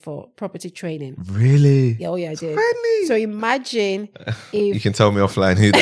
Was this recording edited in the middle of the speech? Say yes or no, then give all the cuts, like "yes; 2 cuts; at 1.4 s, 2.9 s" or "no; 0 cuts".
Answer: no; 0 cuts